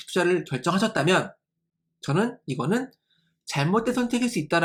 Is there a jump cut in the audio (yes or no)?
no